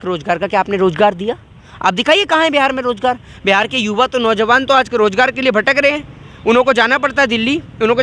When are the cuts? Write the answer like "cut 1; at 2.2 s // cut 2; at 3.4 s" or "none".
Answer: none